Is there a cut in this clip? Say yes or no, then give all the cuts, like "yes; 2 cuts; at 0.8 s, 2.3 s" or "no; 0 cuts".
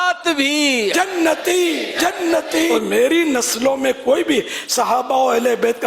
yes; 1 cut; at 2.7 s